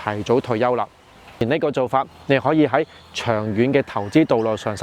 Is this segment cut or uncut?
cut